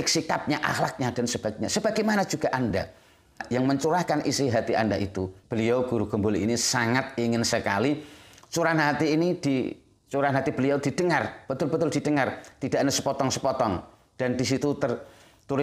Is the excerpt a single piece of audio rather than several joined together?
no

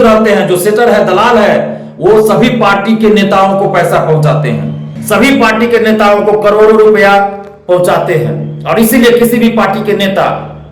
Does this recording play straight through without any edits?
no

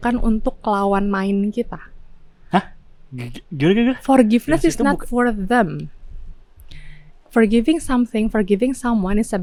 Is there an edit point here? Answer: no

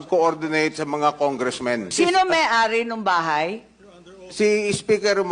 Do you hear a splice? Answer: yes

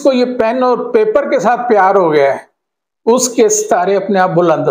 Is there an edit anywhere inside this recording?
no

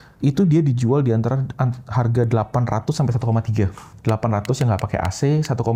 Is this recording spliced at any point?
no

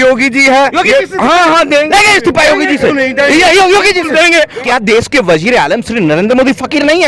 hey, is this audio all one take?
no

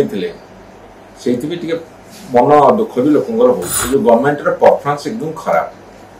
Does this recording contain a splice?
yes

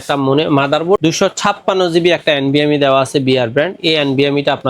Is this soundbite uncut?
no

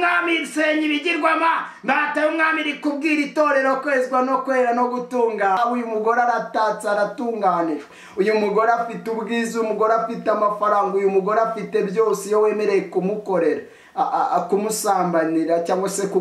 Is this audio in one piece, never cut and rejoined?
no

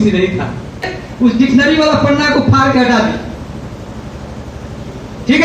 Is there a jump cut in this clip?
yes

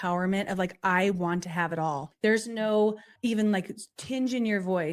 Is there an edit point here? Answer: yes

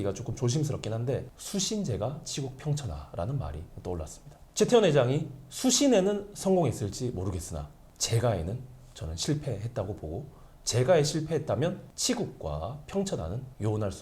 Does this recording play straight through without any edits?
no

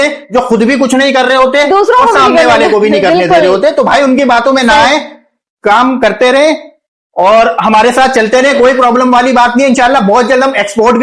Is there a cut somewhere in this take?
no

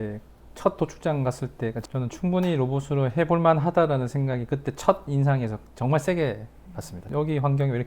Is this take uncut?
no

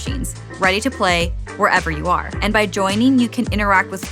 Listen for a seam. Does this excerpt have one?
yes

